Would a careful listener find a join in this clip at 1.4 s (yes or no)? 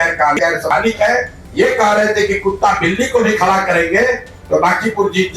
yes